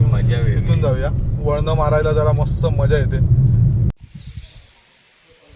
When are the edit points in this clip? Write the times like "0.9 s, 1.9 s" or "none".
3.9 s